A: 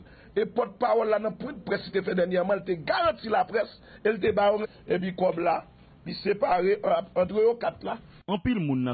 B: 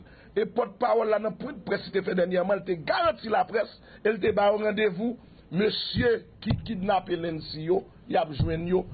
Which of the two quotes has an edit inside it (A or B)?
B